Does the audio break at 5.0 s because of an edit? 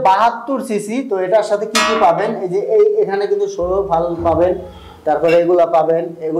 no; 0 cuts

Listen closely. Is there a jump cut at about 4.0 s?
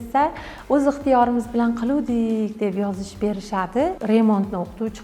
yes; 1 cut; at 4.0 s

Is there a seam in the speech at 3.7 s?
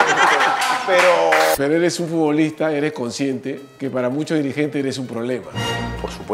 yes; 2 cuts; at 1.5 s, 3.7 s

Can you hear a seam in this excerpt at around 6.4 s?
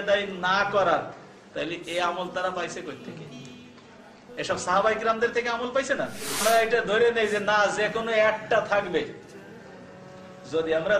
yes; 1 cut; at 6.4 s

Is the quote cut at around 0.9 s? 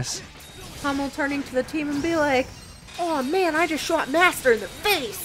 no; 0 cuts

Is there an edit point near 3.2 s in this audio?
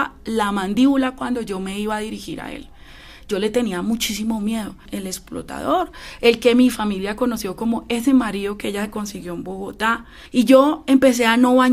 no; 2 cuts; at 4.9 s, 10.1 s

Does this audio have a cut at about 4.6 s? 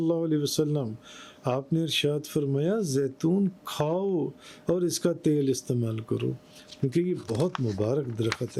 no; 0 cuts

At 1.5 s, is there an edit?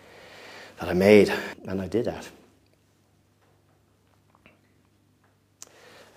yes; 1 cut; at 1.5 s

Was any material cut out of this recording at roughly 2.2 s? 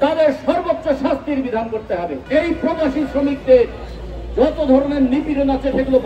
yes; 1 cut; at 2.2 s

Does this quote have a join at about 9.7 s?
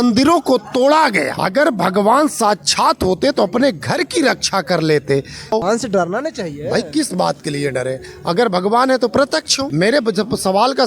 no; 1 cut; at 5.5 s

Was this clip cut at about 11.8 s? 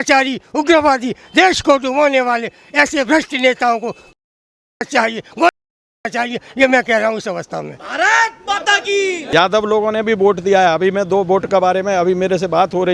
no; 1 cut; at 9.2 s

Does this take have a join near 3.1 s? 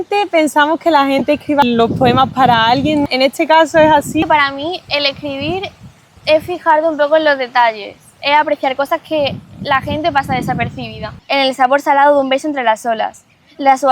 yes; 3 cuts; at 3.1 s, 4.2 s, 11.1 s

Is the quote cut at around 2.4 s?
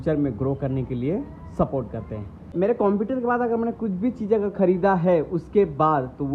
yes; 1 cut; at 2.4 s

